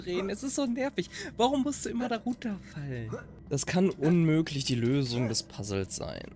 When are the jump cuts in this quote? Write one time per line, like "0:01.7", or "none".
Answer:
0:03.3